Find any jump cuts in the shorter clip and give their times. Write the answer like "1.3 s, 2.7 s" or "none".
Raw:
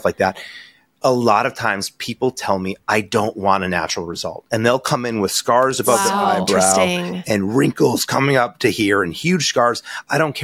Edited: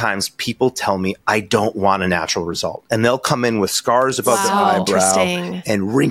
none